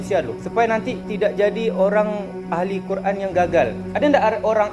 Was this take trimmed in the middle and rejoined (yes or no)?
yes